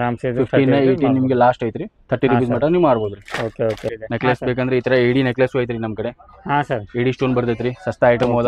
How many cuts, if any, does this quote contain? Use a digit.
1